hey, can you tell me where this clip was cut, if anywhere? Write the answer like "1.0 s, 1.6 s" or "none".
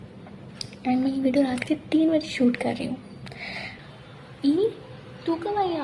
3.7 s